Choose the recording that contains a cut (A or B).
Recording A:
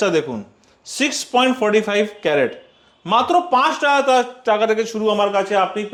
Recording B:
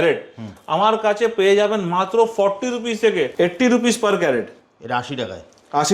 B